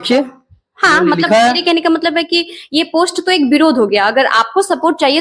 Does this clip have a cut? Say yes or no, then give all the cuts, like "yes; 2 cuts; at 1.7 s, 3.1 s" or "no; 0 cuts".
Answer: no; 0 cuts